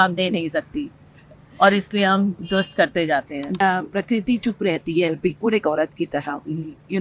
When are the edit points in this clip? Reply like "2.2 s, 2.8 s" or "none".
3.6 s